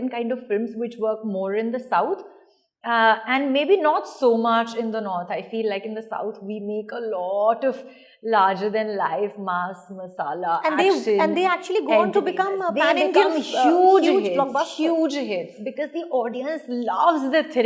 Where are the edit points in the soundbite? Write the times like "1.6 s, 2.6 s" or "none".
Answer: none